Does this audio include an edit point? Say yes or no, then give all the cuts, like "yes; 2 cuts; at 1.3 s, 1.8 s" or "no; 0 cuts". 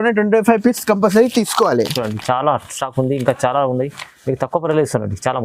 no; 0 cuts